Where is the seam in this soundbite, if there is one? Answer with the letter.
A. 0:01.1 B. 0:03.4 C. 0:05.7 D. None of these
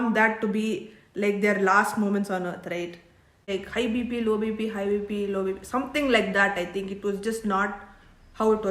B